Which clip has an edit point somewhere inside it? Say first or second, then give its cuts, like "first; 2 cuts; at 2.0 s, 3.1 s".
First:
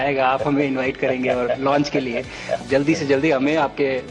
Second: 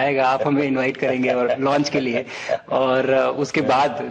first; 1 cut; at 2.6 s